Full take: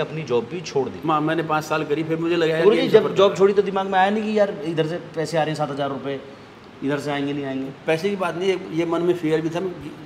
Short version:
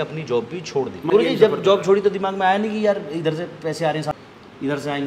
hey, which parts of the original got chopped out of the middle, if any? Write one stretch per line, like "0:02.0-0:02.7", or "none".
0:01.1-0:02.6
0:05.7-0:06.4

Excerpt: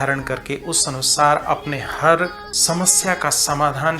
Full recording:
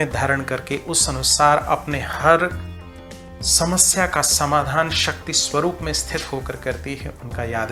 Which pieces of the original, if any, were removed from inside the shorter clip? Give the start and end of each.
0:02.7-0:03.4

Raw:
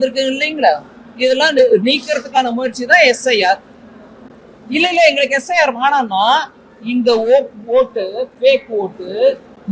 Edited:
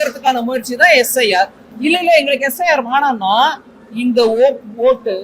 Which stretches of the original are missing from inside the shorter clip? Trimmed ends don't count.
0:03.7-0:04.5

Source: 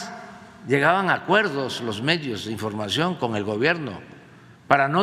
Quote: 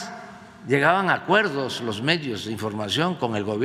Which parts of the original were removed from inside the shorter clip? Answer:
none

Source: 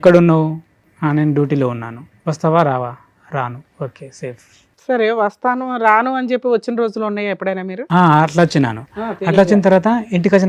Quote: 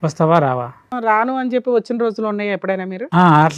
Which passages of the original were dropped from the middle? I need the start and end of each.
0:03.1-0:05.7

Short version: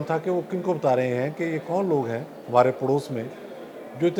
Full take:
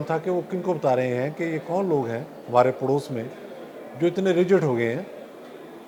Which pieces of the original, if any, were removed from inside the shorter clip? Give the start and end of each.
none

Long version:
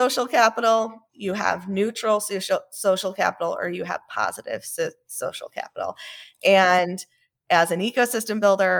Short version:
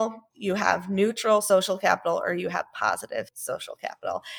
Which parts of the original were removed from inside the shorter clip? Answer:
0:02.2-0:02.8
0:04.7-0:05.1

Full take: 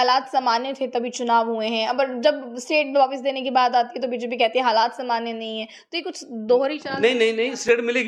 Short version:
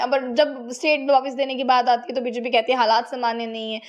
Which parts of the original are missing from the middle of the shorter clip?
none

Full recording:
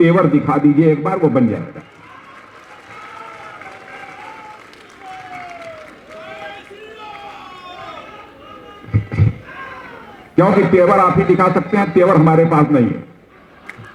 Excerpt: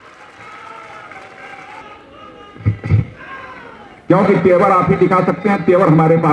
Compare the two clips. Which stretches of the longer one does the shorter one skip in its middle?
0:04.3-0:08.1

